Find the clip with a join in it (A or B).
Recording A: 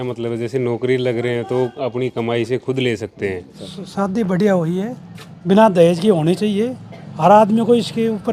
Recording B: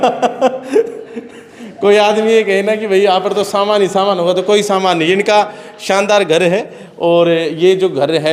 A